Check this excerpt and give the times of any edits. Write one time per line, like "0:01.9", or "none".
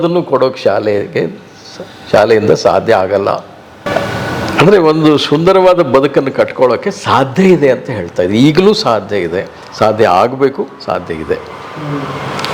0:03.8